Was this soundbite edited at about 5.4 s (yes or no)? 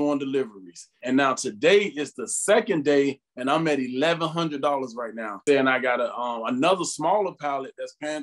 yes